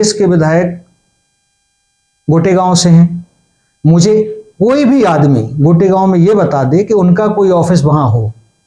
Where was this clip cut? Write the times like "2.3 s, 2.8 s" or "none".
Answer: none